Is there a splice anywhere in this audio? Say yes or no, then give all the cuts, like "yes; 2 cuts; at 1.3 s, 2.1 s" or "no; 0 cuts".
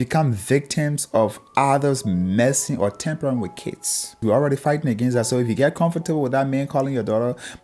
yes; 1 cut; at 4.2 s